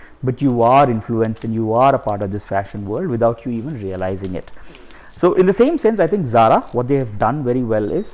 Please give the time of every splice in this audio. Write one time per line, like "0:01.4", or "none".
none